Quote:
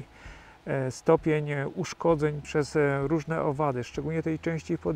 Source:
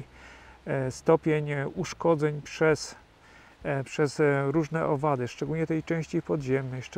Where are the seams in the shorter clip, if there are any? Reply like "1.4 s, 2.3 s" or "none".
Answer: 2.4 s